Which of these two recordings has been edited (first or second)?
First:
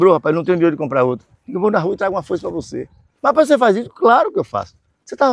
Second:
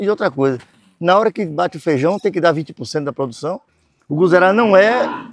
second